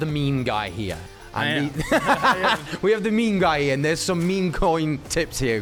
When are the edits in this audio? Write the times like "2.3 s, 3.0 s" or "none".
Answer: none

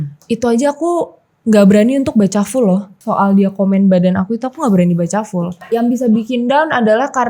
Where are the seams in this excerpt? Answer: 2.9 s, 5.6 s

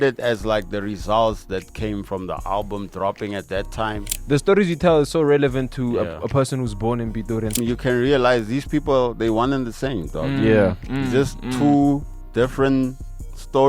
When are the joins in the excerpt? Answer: 4.1 s, 7.6 s

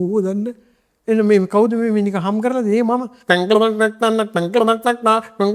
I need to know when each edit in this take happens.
3.1 s

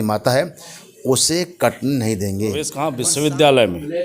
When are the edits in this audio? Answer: 2.8 s

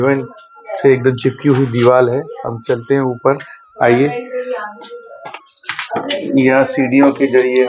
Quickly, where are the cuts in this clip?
none

